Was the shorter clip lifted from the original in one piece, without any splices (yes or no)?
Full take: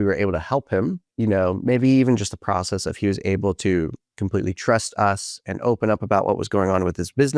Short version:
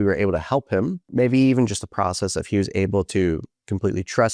no